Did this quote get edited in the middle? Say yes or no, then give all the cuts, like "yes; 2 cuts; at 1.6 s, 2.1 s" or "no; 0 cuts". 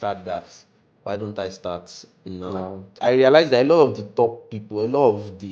yes; 1 cut; at 2.9 s